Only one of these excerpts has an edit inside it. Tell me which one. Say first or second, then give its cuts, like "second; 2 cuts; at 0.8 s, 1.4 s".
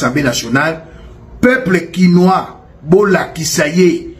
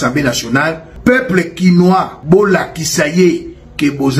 second; 2 cuts; at 0.9 s, 2.1 s